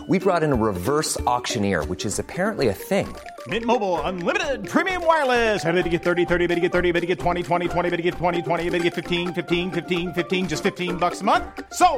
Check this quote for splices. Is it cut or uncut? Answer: uncut